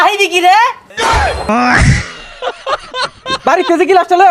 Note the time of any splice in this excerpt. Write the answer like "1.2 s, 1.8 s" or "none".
1.2 s, 3.3 s